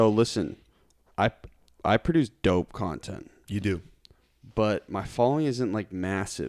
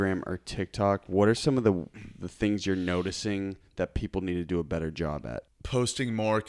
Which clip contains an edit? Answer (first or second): second